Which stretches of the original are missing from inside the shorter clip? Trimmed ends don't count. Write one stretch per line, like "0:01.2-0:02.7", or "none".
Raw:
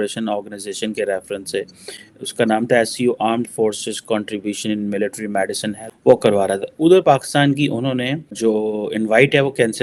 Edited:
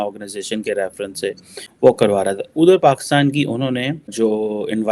0:01.9-0:05.9

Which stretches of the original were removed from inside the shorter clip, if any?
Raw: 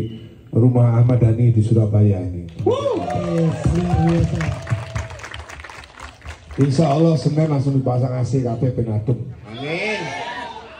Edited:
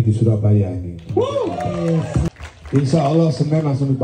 0:03.8-0:06.1

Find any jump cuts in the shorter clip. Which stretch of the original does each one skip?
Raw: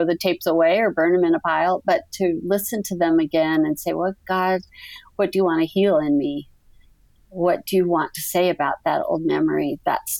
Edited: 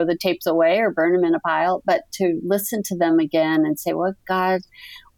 none

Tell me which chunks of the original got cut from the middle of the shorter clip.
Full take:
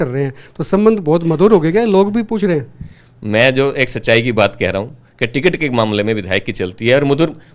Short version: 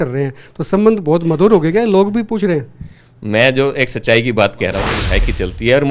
0:05.0-0:06.2

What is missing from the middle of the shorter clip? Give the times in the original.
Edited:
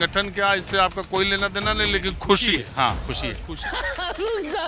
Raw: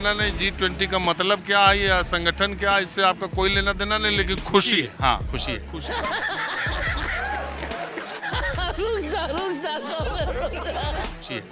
0:05.8-0:08.1

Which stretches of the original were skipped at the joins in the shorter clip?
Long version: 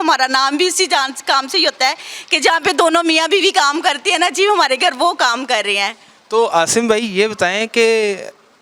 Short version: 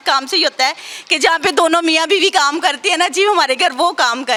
none

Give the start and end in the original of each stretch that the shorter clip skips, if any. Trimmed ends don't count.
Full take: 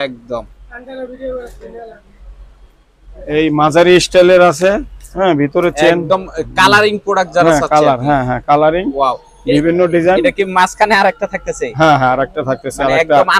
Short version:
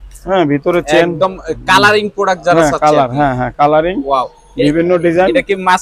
none

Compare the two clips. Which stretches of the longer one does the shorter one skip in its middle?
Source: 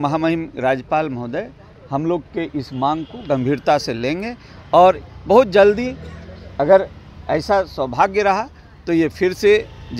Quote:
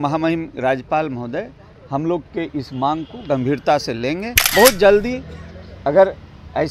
0:04.4-0:05.1

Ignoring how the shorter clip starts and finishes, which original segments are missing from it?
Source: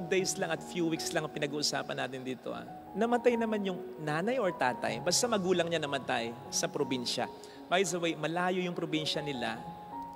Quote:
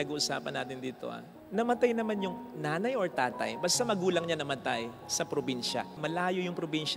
0:07.4-0:08.2

